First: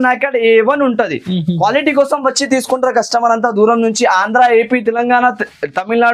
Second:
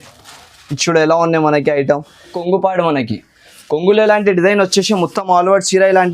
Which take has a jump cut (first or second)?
second